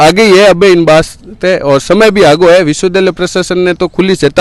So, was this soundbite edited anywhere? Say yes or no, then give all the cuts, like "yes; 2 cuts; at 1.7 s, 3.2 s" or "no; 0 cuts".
no; 0 cuts